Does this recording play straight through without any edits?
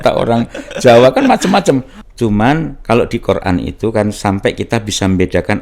no; 1 cut; at 1.9 s

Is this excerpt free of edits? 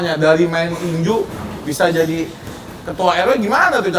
yes; 0 cuts

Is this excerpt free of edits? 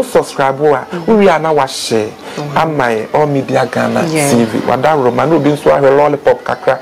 yes; 0 cuts

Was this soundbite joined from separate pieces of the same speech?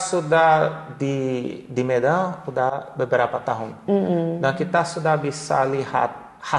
no; 0 cuts

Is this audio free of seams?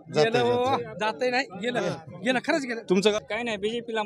no; 1 cut; at 3.1 s

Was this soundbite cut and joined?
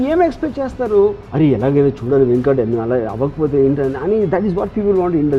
no; 0 cuts

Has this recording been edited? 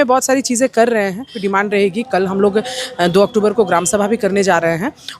yes; 1 cut; at 1.4 s

